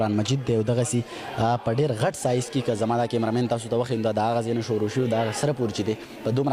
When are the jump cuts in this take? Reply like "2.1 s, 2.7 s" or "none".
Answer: none